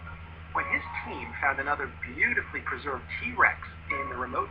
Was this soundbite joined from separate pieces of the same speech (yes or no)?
no